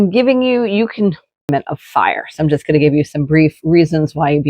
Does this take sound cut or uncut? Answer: cut